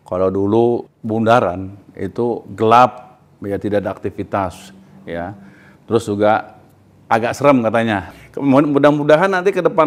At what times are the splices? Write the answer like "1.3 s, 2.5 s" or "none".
0.9 s, 8.1 s